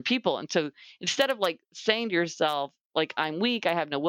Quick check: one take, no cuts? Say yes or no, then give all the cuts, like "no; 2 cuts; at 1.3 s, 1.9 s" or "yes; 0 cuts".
yes; 0 cuts